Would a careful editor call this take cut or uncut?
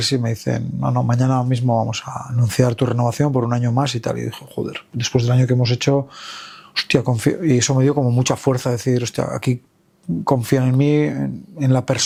uncut